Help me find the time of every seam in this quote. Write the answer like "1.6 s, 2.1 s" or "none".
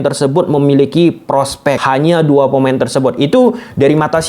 1.8 s